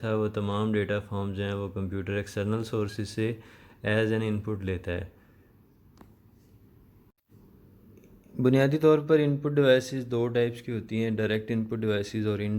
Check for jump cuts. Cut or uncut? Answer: cut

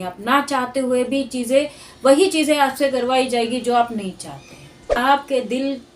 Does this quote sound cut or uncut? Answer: cut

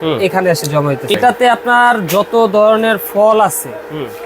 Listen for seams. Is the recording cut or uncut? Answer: cut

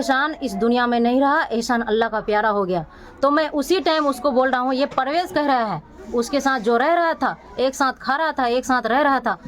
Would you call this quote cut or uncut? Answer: uncut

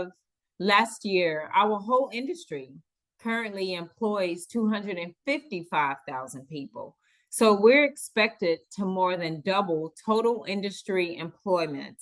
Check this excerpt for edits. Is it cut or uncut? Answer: uncut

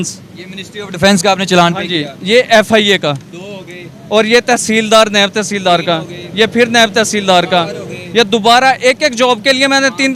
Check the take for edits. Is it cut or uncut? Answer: uncut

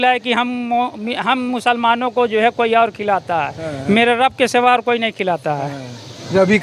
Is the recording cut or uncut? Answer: uncut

